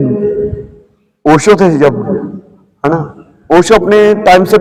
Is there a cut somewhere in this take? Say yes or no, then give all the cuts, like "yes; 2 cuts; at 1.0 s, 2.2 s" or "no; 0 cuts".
no; 0 cuts